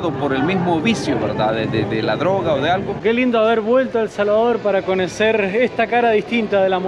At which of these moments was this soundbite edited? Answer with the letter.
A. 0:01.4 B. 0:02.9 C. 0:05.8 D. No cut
B